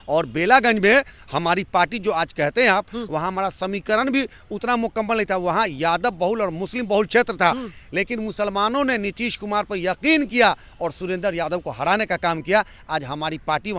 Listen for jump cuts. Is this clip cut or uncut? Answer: uncut